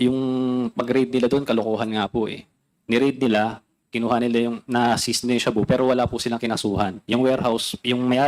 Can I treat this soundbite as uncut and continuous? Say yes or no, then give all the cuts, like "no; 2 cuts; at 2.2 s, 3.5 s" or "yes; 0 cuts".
yes; 0 cuts